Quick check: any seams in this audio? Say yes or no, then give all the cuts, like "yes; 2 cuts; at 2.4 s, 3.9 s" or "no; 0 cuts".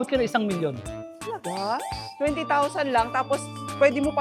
no; 0 cuts